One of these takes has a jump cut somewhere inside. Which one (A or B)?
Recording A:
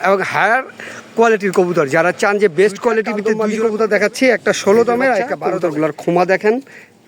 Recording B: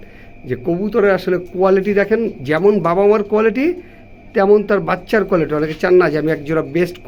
A